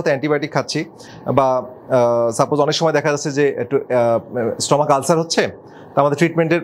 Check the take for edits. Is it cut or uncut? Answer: uncut